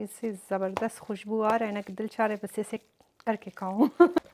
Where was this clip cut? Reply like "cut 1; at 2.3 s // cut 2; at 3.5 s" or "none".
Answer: none